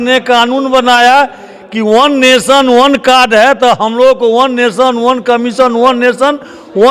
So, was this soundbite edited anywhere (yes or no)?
no